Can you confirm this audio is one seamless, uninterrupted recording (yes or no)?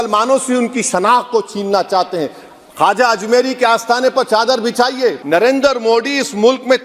no